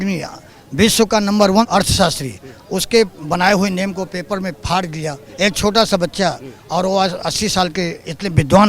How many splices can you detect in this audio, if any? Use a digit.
2